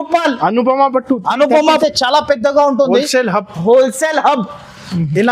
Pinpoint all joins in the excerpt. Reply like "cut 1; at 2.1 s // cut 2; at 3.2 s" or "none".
cut 1; at 1.6 s